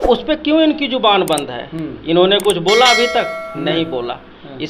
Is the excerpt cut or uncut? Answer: uncut